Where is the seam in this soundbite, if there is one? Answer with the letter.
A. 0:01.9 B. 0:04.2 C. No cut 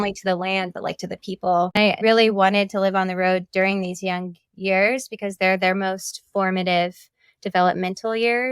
A